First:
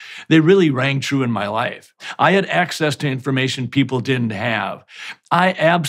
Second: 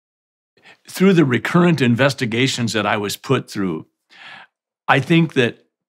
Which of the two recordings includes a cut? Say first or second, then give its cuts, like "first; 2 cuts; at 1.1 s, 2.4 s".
first; 1 cut; at 2.0 s